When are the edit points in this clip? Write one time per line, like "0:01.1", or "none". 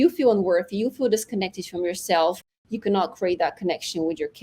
none